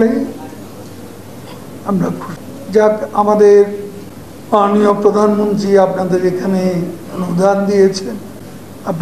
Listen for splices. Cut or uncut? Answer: uncut